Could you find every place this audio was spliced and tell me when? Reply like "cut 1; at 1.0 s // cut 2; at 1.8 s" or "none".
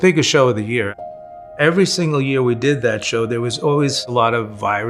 cut 1; at 1.0 s